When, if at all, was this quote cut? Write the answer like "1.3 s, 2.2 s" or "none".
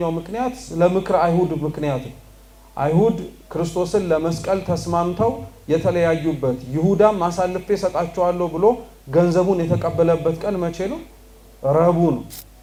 none